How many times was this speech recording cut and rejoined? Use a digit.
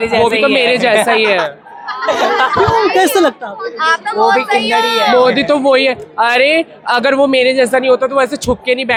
0